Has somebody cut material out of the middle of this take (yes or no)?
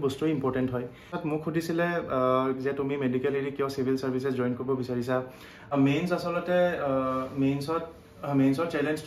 yes